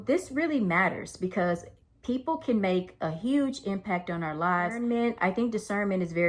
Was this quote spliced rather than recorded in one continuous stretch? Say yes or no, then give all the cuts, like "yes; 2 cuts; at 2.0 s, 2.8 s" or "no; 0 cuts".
yes; 1 cut; at 4.8 s